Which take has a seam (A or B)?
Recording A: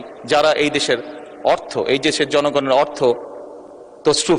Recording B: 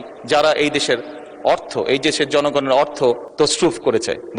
B